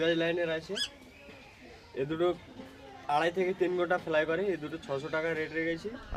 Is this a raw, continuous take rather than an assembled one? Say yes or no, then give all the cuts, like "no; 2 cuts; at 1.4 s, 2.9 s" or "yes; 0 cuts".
yes; 0 cuts